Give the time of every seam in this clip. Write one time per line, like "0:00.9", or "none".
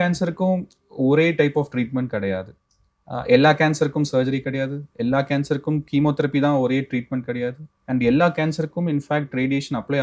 none